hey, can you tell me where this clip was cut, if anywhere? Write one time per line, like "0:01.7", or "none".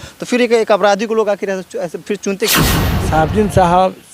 0:02.8